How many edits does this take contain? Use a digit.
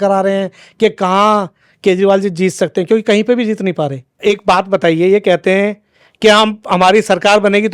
1